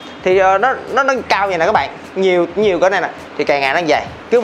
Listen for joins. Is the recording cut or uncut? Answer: uncut